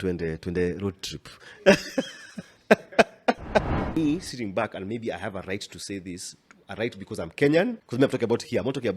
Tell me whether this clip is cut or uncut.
cut